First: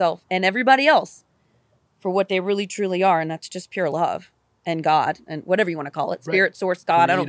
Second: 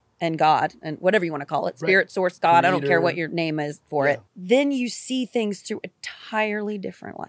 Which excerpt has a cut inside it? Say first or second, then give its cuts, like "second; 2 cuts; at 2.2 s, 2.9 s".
second; 1 cut; at 4.3 s